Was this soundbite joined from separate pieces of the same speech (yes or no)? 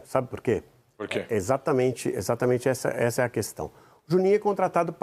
no